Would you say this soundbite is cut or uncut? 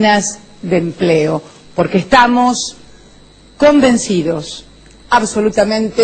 cut